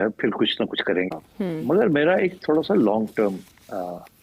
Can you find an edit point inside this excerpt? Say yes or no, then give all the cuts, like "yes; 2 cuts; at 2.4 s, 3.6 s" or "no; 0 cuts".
no; 0 cuts